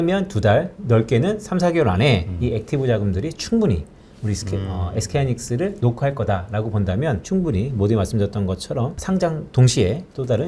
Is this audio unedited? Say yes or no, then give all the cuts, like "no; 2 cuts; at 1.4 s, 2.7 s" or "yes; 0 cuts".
yes; 0 cuts